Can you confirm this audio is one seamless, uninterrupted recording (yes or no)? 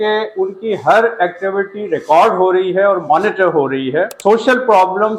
no